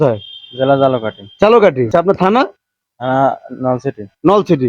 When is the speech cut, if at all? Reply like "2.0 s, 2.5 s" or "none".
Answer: 1.9 s